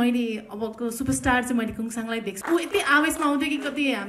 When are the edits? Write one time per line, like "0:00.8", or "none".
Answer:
0:02.4